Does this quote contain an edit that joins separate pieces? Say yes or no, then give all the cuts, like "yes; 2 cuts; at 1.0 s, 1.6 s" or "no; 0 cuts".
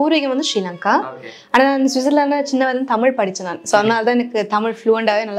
no; 0 cuts